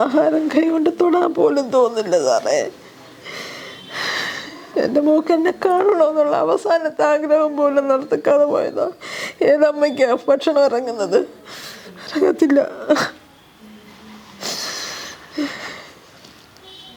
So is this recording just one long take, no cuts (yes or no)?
yes